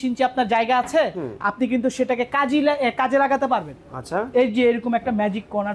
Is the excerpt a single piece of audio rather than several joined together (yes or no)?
yes